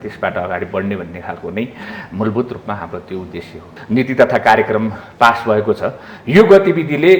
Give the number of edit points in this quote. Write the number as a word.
one